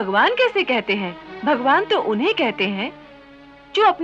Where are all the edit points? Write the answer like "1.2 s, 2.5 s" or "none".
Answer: 1.2 s